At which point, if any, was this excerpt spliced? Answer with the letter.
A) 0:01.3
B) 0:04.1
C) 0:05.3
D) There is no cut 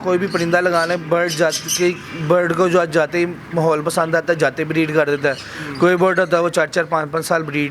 D